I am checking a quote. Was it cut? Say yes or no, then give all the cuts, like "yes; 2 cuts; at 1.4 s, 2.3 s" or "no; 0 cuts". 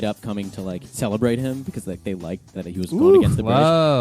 yes; 2 cuts; at 0.9 s, 2.5 s